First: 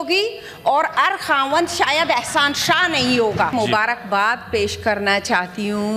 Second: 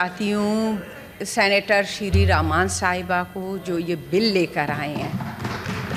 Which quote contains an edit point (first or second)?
first